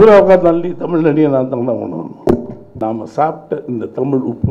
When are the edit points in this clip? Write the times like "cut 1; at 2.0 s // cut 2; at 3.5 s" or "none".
cut 1; at 2.6 s